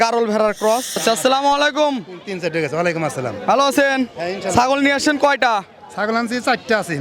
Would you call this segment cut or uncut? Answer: cut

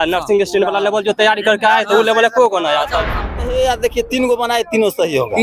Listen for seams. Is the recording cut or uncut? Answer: cut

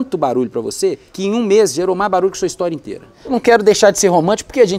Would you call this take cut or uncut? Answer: cut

